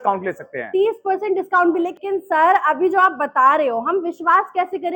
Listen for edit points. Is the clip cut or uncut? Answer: cut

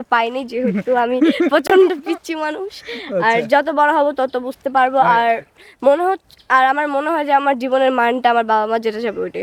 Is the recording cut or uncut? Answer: uncut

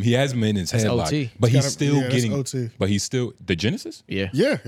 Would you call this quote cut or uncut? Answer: uncut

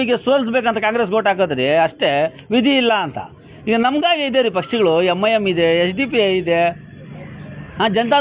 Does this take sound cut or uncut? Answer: uncut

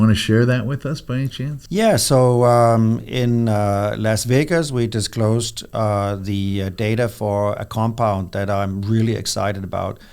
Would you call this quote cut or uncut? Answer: cut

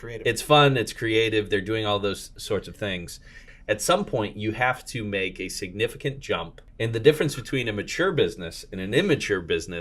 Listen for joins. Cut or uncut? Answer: cut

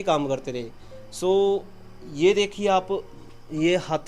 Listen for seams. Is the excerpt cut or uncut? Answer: uncut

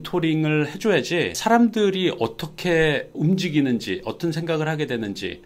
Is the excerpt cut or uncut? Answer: uncut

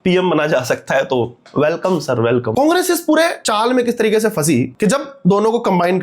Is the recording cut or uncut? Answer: cut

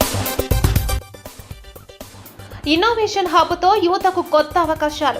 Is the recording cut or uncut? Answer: cut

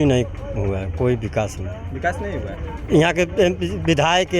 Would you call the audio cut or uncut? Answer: uncut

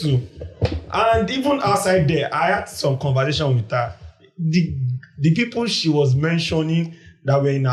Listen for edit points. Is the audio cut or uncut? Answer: uncut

